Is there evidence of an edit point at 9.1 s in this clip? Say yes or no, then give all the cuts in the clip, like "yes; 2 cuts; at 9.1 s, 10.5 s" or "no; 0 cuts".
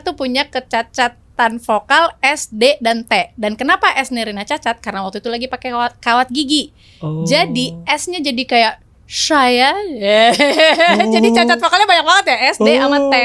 no; 0 cuts